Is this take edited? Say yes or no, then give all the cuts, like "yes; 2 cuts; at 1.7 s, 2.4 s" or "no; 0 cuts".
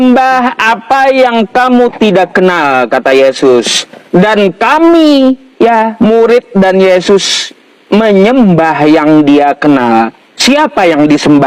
no; 0 cuts